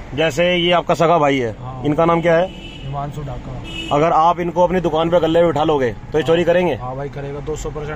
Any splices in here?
no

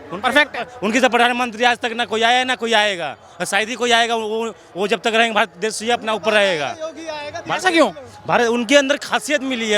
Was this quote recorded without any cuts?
yes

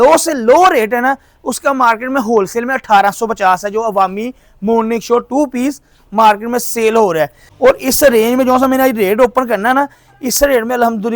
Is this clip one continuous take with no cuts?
no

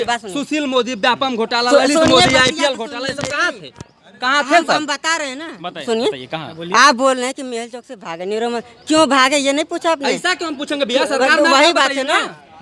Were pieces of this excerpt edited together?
no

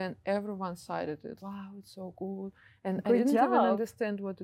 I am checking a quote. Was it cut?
yes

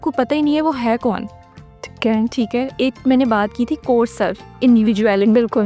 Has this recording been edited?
no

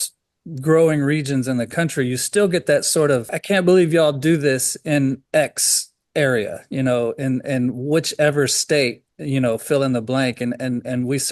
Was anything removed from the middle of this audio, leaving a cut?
yes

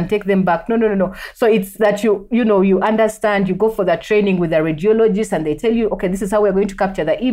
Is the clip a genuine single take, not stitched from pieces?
yes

